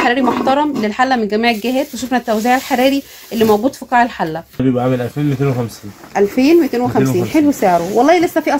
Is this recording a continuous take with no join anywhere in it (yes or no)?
no